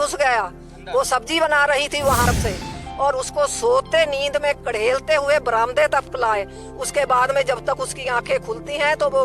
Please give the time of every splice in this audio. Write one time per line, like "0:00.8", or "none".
0:02.3